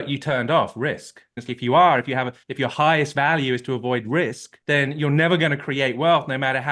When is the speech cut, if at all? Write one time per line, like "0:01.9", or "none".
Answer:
0:01.3